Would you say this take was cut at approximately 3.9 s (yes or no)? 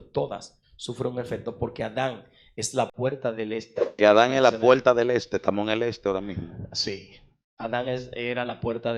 yes